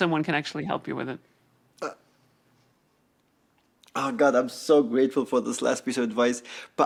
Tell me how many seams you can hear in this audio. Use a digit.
0